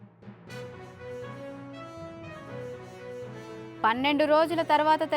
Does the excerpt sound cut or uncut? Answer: uncut